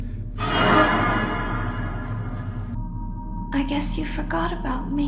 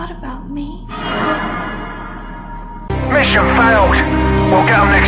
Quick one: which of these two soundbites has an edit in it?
first; 1 cut; at 2.7 s

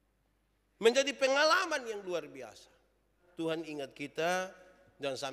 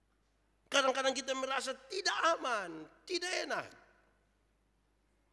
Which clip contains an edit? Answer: first; 1 cut; at 3.2 s

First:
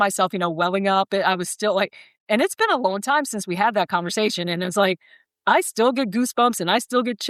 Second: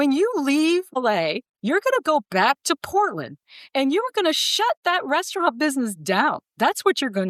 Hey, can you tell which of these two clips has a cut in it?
second; 2 cuts; at 1.0 s, 6.5 s

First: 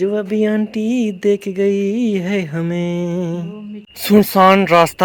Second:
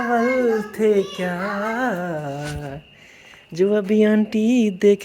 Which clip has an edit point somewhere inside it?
first; 1 cut; at 3.9 s

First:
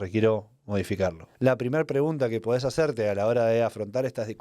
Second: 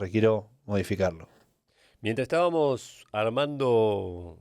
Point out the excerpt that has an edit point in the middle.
first; 1 cut; at 1.2 s

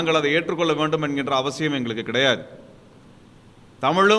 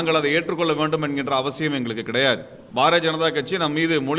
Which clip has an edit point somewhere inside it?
second; 1 cut; at 2.6 s

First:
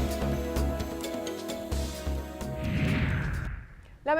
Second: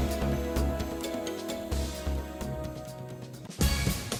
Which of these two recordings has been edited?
first; 1 cut; at 2.6 s

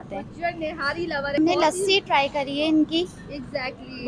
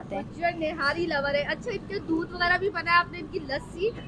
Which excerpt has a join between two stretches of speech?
first; 1 cut; at 1.4 s

